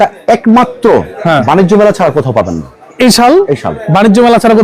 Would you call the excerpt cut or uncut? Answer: uncut